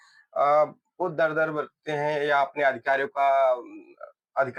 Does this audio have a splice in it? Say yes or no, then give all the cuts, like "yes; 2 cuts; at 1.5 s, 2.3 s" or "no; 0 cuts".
no; 0 cuts